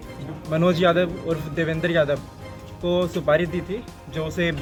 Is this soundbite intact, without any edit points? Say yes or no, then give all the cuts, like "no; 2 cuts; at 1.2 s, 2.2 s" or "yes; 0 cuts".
yes; 0 cuts